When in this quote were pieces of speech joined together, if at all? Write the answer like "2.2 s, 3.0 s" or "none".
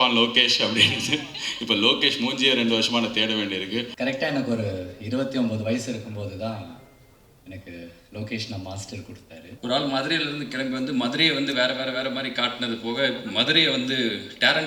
3.9 s, 9.4 s